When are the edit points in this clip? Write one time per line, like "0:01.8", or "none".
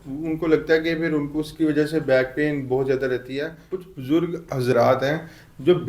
0:03.7